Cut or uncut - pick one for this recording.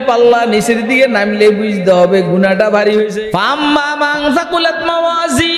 cut